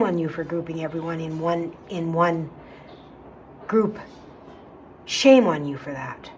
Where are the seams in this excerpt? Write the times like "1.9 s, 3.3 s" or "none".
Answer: none